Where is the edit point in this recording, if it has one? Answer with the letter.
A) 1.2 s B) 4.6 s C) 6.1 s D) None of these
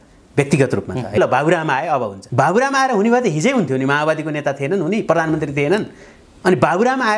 A